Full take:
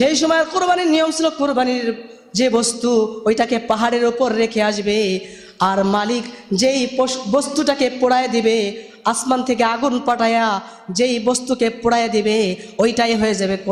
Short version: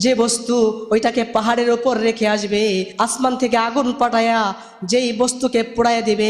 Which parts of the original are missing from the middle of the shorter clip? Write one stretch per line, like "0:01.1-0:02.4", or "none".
0:05.3-0:09.0